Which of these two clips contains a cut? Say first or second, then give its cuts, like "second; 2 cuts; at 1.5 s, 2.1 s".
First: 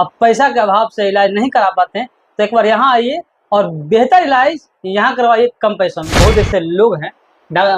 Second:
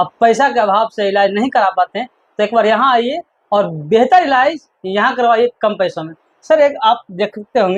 first; 1 cut; at 6.1 s